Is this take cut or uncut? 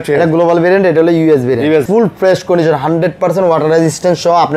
cut